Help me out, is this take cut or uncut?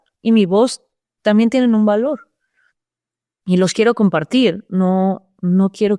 uncut